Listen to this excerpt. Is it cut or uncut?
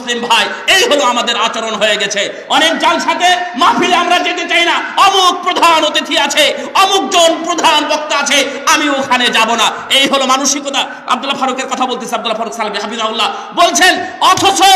uncut